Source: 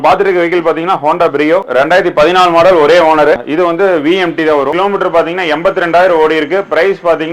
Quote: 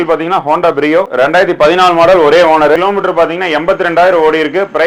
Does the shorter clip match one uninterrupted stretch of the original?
no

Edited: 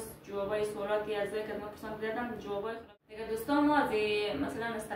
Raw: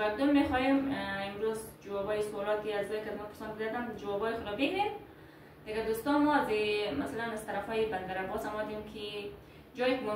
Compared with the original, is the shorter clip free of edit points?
no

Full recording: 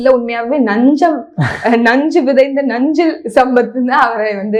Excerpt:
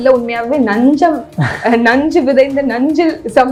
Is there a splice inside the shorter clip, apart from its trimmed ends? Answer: no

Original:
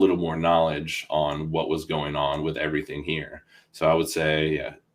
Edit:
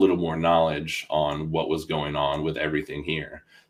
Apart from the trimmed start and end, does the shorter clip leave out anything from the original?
no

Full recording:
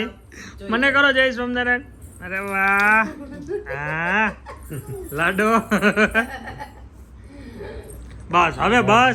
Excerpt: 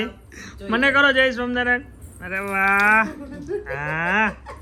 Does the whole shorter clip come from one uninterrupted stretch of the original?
yes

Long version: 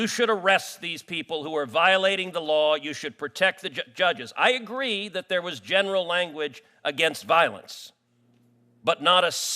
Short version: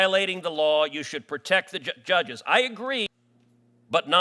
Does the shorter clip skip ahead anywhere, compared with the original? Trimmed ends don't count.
yes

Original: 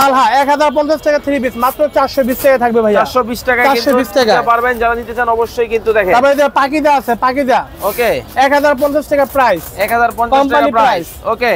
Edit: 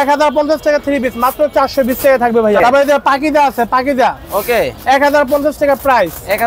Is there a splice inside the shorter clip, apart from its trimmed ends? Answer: yes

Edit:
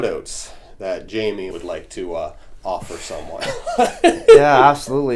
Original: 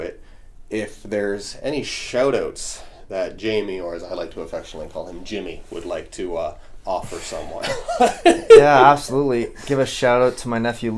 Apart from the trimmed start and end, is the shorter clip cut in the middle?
yes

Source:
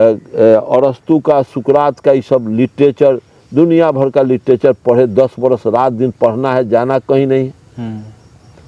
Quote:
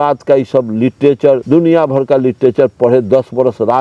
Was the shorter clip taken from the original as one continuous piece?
no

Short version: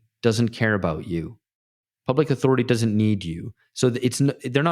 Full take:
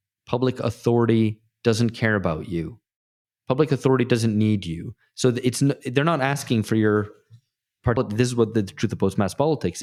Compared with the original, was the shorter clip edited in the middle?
no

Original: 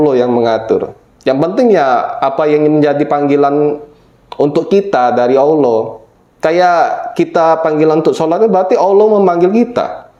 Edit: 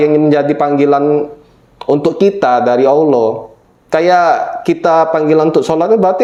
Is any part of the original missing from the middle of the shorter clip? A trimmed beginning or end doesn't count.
no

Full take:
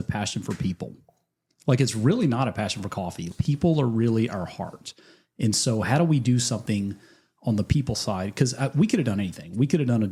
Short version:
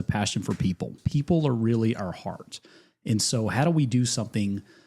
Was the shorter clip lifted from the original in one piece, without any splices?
no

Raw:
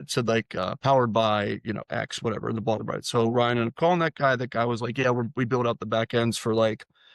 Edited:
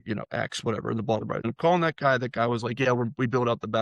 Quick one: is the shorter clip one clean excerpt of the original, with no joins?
no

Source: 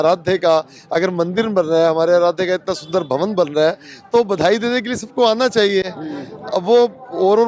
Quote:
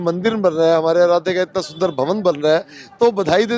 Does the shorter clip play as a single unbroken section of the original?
yes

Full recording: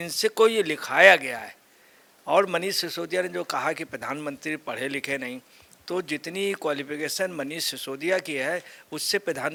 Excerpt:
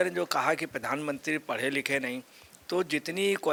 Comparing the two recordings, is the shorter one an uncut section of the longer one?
yes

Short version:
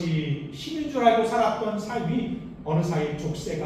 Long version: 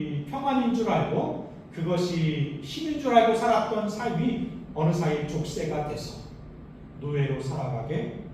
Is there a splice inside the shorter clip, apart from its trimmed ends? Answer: no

